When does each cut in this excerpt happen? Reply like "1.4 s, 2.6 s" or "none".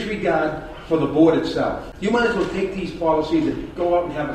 1.9 s